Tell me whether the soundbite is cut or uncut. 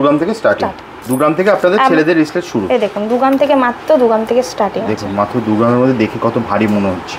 cut